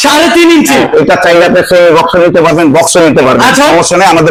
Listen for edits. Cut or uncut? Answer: uncut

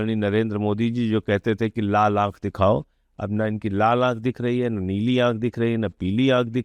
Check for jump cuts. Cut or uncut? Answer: uncut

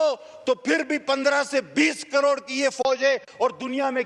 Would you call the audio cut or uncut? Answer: uncut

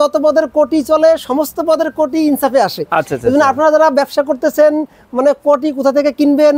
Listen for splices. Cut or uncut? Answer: uncut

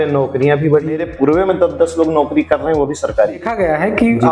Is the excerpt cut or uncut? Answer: cut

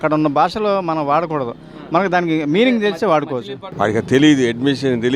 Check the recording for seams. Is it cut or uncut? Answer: cut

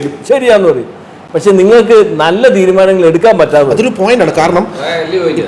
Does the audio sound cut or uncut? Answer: uncut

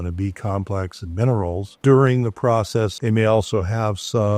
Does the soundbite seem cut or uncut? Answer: cut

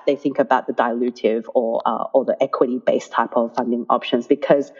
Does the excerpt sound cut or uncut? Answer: uncut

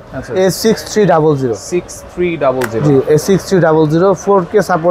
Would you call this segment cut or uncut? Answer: uncut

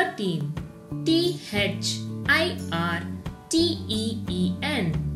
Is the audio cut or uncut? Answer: uncut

